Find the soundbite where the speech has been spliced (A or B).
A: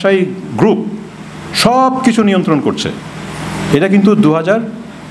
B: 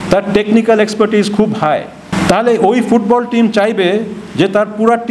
B